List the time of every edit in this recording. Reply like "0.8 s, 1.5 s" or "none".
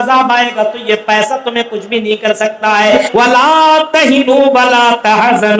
3.0 s